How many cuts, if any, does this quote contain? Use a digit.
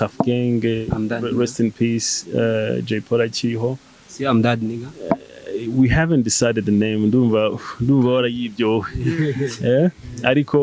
0